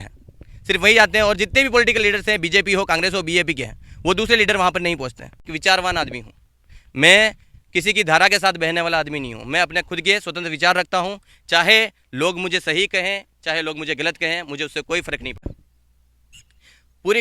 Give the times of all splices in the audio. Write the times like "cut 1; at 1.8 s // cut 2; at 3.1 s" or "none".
cut 1; at 5.5 s // cut 2; at 15.4 s